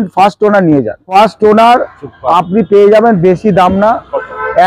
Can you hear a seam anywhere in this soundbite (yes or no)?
yes